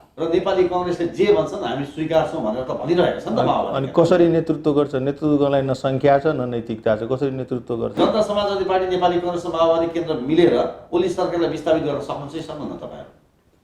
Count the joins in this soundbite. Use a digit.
1